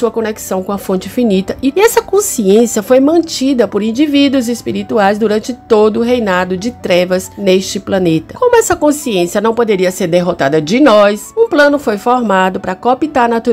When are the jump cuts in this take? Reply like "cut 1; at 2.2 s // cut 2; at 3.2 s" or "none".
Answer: cut 1; at 1.7 s // cut 2; at 7.3 s // cut 3; at 8.3 s // cut 4; at 11.2 s